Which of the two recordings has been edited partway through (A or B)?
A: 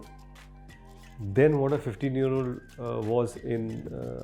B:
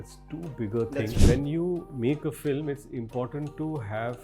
B